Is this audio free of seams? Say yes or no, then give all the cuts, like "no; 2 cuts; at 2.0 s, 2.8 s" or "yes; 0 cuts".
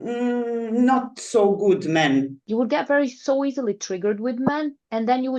no; 1 cut; at 2.4 s